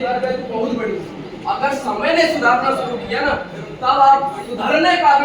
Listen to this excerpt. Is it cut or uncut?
uncut